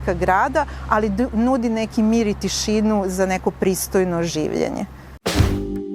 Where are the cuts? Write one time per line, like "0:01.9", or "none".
0:05.0